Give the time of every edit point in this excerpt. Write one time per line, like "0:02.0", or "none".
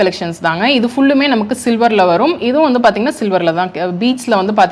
none